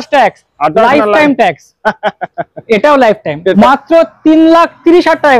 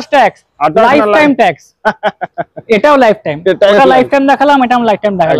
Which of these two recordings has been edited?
first; 1 cut; at 3.5 s

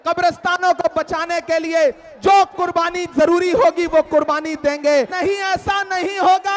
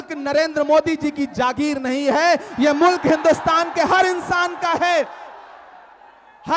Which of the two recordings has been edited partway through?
first; 1 cut; at 5.1 s

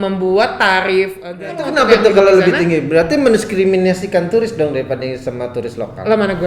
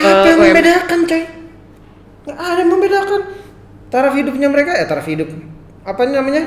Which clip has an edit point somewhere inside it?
first; 1 cut; at 1.3 s

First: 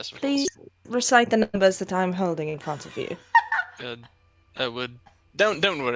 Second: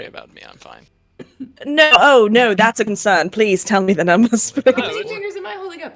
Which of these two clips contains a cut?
second; 1 cut; at 4.8 s

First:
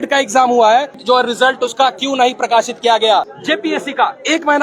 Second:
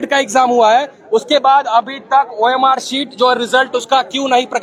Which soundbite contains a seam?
first; 2 cuts; at 0.9 s, 3.4 s

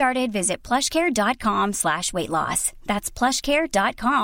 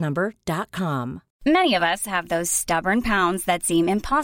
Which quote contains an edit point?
second; 1 cut; at 1.3 s

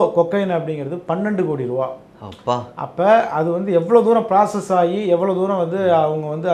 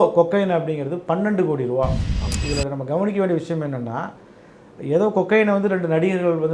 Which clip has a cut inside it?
second; 1 cut; at 2.3 s

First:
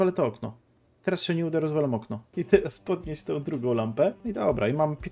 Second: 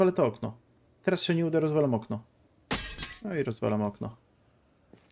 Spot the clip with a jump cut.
first; 2 cuts; at 2.3 s, 4.2 s

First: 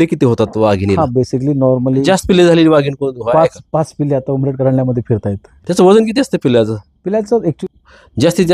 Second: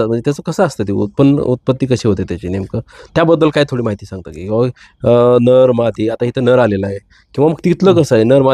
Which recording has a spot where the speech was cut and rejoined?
first; 3 cuts; at 2.0 s, 5.5 s, 7.6 s

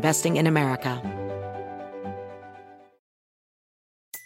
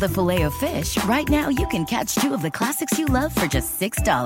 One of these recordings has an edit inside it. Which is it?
first; 1 cut; at 1.0 s

